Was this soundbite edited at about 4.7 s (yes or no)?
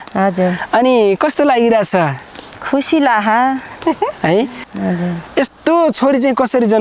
yes